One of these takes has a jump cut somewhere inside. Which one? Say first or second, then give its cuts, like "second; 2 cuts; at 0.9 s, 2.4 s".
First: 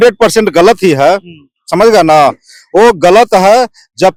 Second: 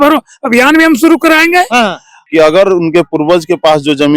second; 1 cut; at 2.2 s